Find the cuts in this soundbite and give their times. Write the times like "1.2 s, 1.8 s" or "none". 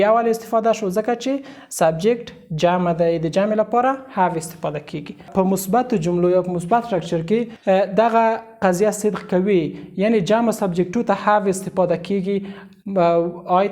5.3 s